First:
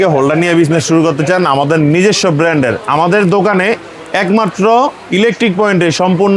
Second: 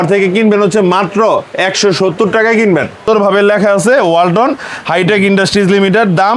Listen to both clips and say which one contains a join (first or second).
second